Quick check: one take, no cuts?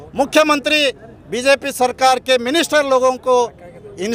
yes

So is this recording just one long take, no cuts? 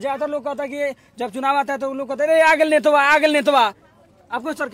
yes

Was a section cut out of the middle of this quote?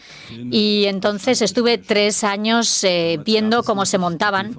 no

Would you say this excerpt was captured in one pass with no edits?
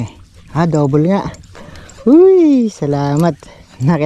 yes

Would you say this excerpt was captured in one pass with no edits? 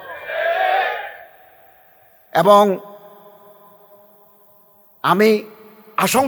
yes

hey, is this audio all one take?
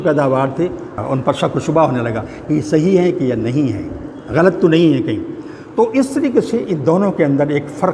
no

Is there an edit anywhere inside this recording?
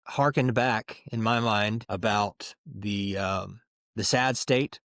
yes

